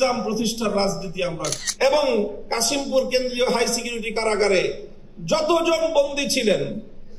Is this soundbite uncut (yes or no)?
no